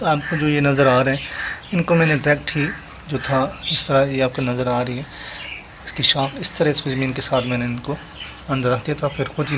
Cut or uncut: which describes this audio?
uncut